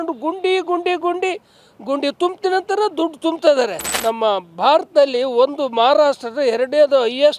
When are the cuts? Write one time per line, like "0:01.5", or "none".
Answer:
0:03.9